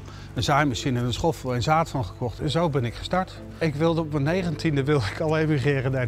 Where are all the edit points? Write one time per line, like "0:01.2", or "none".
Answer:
0:03.4